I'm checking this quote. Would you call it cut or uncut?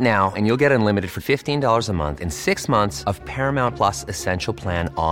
uncut